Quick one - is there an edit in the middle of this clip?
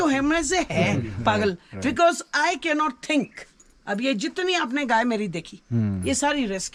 no; 0 cuts

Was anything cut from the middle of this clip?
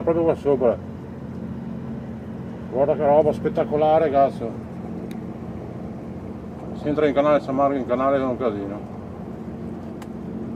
no; 0 cuts

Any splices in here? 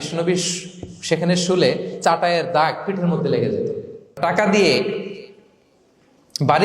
yes; 1 cut; at 4.2 s

